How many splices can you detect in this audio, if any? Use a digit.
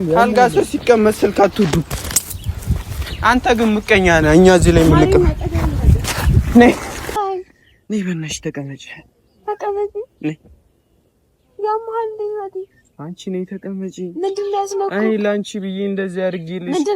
1